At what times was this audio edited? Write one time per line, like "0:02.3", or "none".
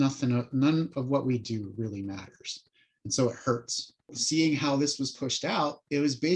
0:04.2